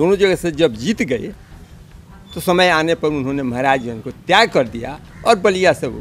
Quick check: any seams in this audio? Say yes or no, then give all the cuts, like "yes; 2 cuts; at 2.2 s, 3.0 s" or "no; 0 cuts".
no; 0 cuts